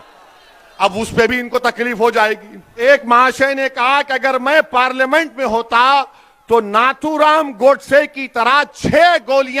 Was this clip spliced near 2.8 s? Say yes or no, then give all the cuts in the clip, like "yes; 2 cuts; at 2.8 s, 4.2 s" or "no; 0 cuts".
yes; 1 cut; at 2.8 s